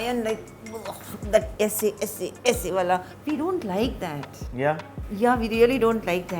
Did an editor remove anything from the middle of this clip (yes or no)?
yes